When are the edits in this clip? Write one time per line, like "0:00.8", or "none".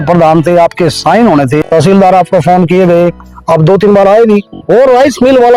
0:01.6
0:04.6